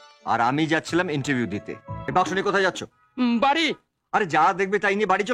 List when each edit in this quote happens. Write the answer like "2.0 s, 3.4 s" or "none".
2.1 s

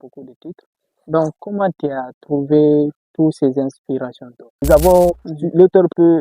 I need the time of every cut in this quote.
4.6 s

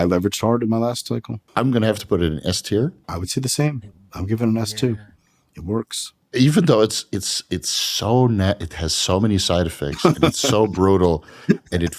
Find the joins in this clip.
1.4 s, 3.0 s

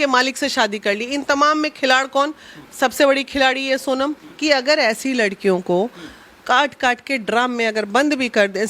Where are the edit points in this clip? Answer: 4.3 s

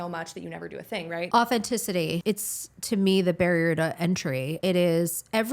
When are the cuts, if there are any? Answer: 1.3 s, 2.2 s, 4.5 s

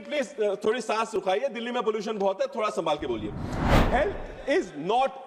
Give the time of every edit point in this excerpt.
3.7 s

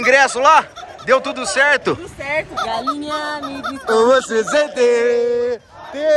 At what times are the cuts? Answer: 2.5 s

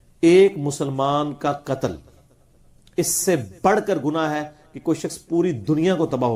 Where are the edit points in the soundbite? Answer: none

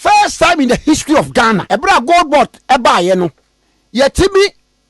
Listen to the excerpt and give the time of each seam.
1.6 s

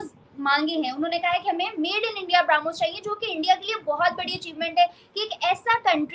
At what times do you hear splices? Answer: none

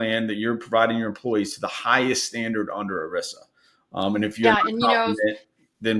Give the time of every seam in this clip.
none

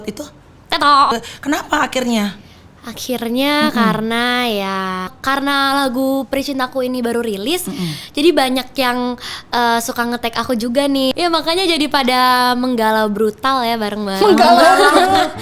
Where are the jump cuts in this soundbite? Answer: 1.1 s, 5.2 s, 11.1 s

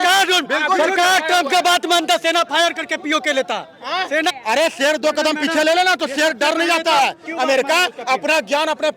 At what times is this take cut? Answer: 4.3 s, 7.3 s

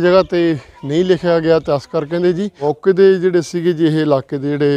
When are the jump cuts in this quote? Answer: 2.6 s

